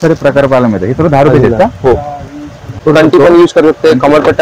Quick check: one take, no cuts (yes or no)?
no